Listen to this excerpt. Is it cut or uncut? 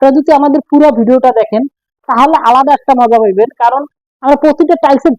uncut